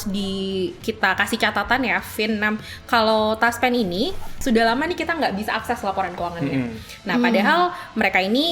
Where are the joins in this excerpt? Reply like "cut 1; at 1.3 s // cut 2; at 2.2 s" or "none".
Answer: cut 1; at 4.3 s